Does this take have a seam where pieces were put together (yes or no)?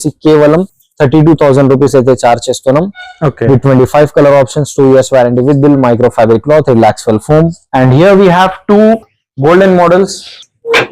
yes